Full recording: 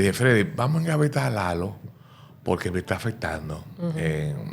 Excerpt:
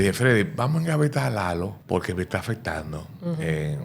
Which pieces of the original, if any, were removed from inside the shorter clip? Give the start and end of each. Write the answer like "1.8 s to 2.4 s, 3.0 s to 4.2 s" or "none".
1.8 s to 2.3 s